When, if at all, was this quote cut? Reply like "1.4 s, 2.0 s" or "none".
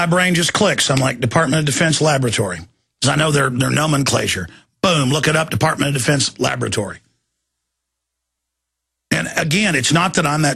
1.0 s